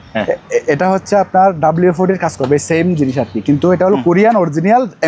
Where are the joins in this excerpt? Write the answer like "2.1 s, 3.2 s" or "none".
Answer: none